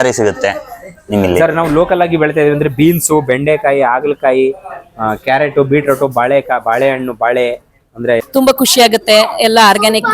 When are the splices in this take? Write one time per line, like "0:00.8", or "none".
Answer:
0:08.2